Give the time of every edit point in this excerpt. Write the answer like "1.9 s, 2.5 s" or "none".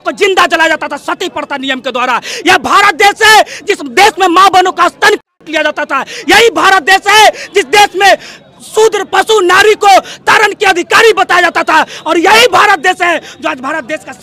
none